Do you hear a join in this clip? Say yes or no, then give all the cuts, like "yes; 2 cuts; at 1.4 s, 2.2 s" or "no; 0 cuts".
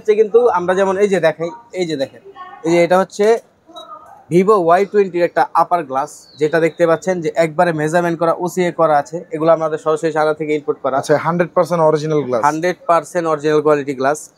no; 0 cuts